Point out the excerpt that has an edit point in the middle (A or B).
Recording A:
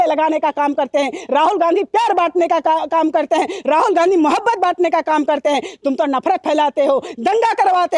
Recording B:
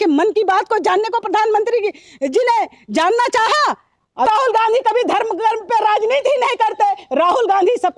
B